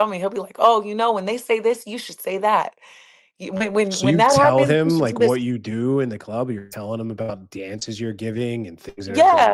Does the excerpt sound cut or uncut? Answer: uncut